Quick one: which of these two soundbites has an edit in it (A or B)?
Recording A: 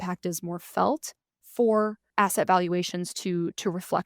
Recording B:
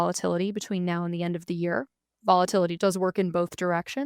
A